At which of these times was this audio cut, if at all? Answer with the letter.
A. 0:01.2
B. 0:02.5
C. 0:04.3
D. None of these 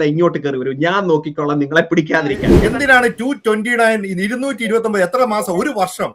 B